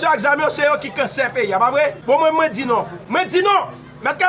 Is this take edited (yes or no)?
yes